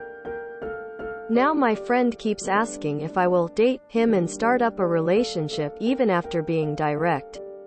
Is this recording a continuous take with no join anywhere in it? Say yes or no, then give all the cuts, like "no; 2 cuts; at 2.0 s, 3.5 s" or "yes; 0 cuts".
no; 1 cut; at 1.0 s